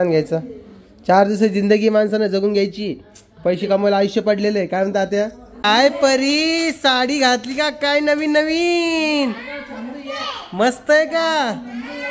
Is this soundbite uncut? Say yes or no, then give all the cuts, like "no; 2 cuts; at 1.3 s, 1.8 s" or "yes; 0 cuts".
no; 1 cut; at 5.5 s